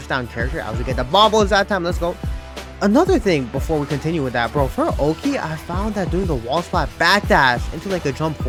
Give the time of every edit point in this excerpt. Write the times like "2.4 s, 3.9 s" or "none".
none